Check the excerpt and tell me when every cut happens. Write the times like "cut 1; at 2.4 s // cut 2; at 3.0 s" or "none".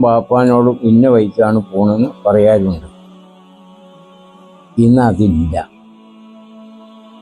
cut 1; at 3.2 s // cut 2; at 4.8 s // cut 3; at 6.3 s